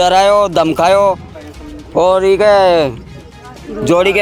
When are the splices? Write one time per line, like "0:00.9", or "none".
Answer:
none